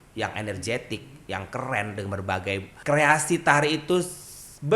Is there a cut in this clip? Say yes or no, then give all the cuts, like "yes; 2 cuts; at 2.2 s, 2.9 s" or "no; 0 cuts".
yes; 1 cut; at 2.7 s